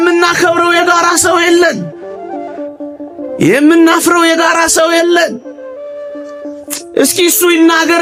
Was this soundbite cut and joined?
no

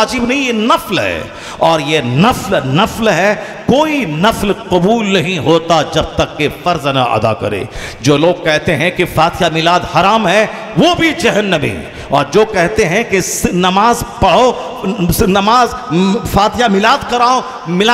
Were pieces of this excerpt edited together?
no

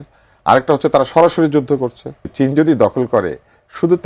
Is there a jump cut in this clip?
yes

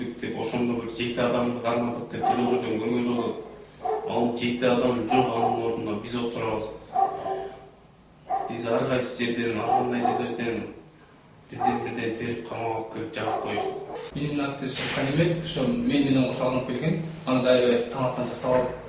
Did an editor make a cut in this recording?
yes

